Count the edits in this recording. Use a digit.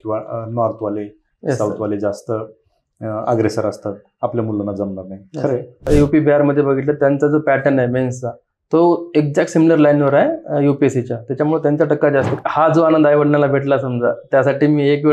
2